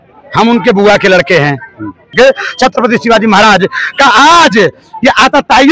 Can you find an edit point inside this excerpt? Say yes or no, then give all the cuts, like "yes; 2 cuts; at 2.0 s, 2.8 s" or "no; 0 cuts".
yes; 1 cut; at 2.1 s